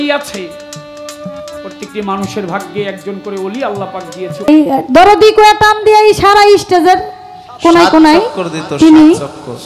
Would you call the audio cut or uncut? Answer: cut